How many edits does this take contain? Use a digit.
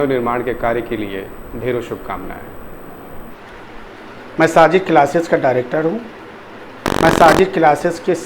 1